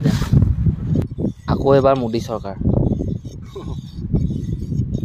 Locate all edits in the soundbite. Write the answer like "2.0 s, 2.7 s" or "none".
0.9 s